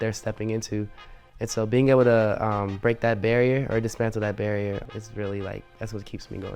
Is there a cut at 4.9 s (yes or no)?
yes